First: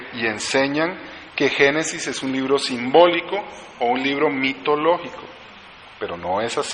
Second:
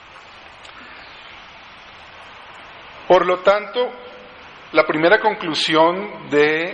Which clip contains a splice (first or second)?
second